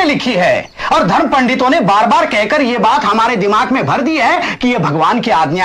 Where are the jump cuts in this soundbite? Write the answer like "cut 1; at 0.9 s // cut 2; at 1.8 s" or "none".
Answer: none